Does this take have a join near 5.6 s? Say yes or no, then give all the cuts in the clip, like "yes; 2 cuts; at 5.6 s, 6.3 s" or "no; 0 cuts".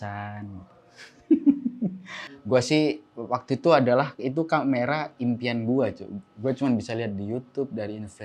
no; 1 cut; at 2.2 s